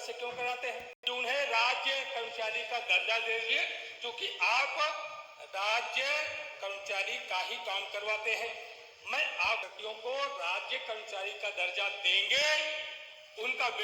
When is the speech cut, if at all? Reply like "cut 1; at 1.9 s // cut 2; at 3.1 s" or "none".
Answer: cut 1; at 0.9 s // cut 2; at 9.6 s